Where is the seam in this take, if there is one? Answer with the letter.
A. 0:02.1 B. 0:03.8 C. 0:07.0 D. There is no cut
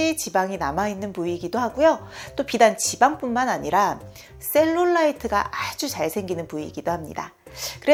D